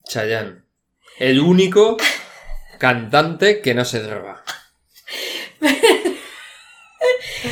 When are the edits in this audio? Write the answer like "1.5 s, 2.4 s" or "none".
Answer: none